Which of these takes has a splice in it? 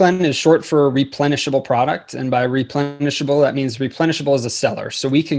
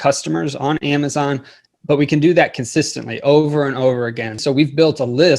second; 1 cut; at 4.4 s

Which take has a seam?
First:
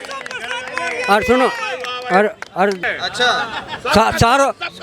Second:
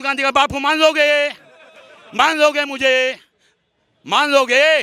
first; 1 cut; at 2.9 s

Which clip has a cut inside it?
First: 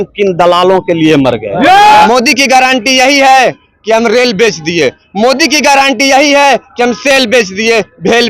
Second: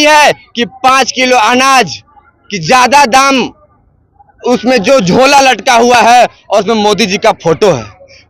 first; 1 cut; at 2.1 s

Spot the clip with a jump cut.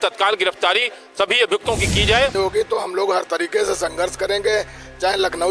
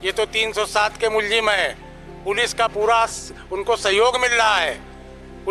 first; 1 cut; at 2.3 s

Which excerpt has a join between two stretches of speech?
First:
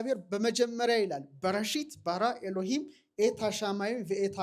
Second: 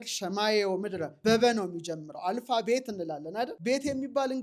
second; 2 cuts; at 1.1 s, 3.6 s

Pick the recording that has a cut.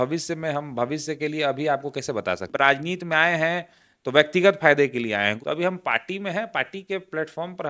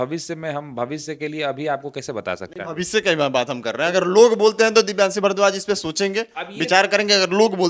first; 2 cuts; at 2.5 s, 5.4 s

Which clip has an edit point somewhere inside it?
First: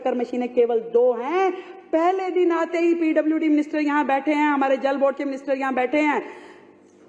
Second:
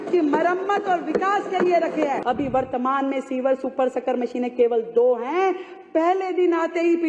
second; 1 cut; at 2.2 s

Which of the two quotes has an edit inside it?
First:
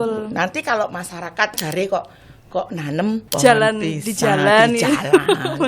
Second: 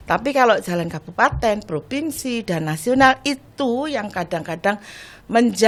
first; 2 cuts; at 1.6 s, 3.3 s

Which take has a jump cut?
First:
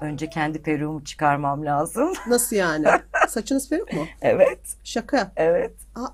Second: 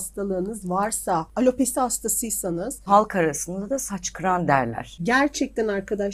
second; 3 cuts; at 1.3 s, 2.8 s, 5.0 s

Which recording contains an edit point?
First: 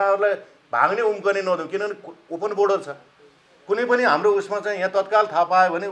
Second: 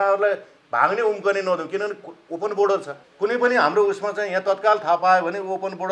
second; 1 cut; at 3.0 s

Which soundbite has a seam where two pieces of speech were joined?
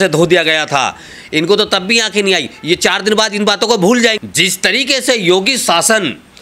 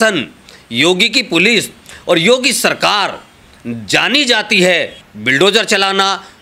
first; 1 cut; at 4.2 s

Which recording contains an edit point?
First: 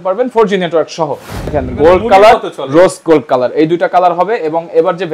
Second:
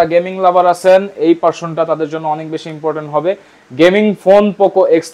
first; 1 cut; at 1.5 s

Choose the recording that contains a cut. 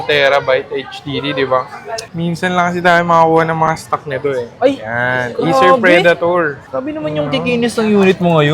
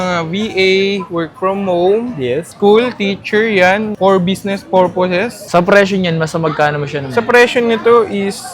first; 1 cut; at 2.0 s

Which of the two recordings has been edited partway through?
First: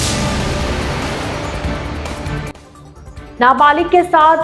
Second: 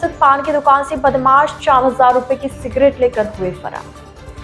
first; 1 cut; at 2.7 s

